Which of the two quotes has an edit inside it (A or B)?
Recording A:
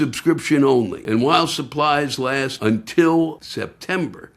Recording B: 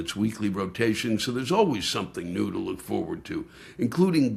A